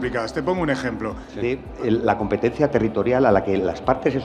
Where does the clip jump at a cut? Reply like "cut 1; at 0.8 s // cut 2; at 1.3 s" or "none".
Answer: cut 1; at 1.3 s